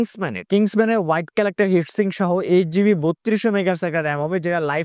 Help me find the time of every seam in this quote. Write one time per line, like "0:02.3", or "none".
none